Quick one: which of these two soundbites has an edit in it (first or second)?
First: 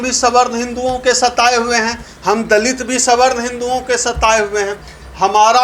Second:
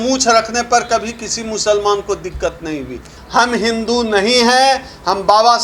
second